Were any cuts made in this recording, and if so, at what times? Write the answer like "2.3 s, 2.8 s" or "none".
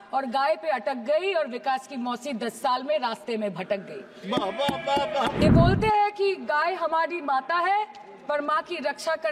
5.4 s